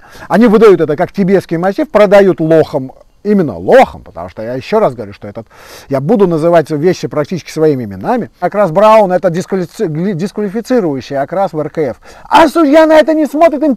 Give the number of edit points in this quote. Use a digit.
1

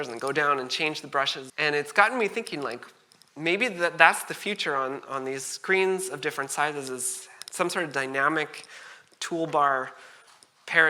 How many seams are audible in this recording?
1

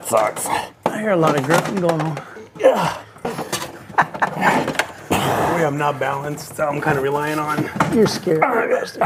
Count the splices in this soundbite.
0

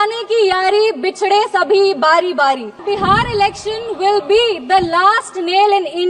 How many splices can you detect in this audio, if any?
1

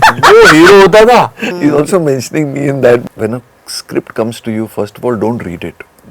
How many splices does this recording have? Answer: 2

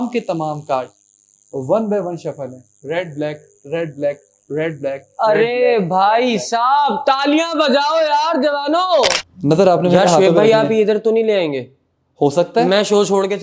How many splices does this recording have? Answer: 1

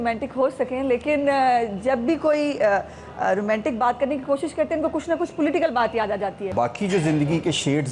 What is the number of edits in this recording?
1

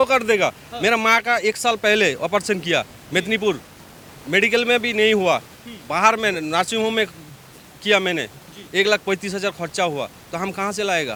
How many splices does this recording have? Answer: 0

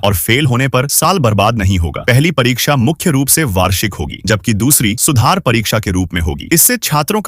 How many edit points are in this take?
0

